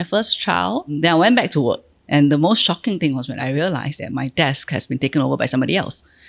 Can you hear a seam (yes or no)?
yes